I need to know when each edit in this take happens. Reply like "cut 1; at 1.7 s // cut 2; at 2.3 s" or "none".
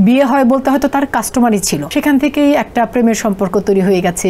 cut 1; at 1.8 s